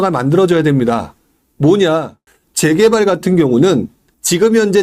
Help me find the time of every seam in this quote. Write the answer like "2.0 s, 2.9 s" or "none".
2.2 s